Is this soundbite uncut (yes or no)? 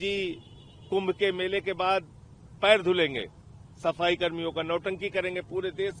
yes